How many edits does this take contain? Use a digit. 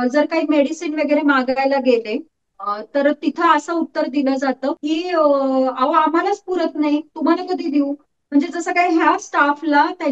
1